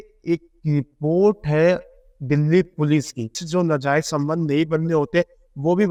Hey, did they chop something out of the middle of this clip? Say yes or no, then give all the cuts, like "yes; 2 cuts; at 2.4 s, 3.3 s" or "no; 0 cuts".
no; 0 cuts